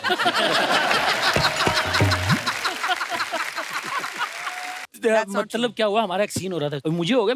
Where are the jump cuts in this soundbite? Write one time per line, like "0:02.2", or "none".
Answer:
0:04.8

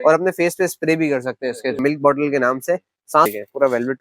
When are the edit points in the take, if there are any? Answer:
0:01.8
0:03.3

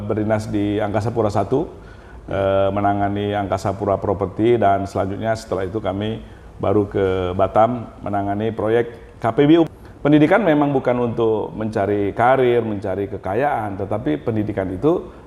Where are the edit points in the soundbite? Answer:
0:09.7

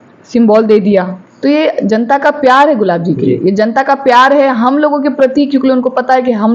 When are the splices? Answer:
0:01.2

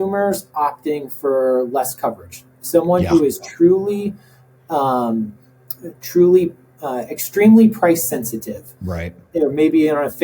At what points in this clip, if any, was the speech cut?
none

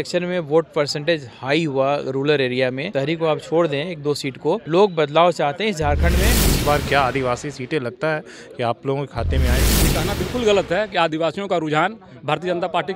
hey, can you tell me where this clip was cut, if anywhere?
0:04.6
0:06.3
0:09.7

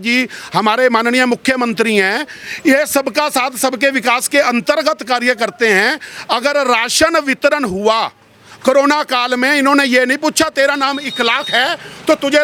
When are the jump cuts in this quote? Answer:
none

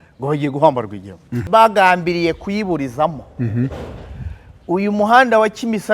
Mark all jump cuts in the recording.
0:01.4

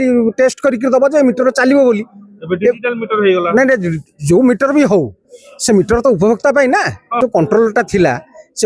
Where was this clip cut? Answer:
0:07.2

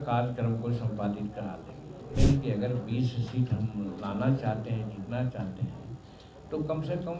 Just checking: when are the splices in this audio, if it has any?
0:02.1

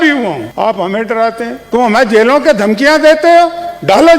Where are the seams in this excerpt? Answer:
0:01.6

